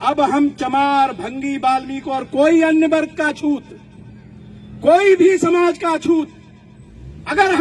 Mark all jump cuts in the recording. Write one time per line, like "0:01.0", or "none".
none